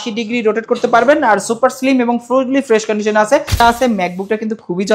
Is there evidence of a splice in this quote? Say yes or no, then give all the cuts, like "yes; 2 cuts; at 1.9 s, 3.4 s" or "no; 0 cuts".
yes; 1 cut; at 3.6 s